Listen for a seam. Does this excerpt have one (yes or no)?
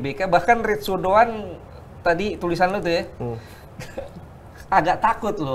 no